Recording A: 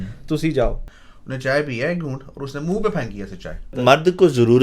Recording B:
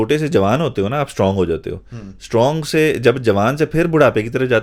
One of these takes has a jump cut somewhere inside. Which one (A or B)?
A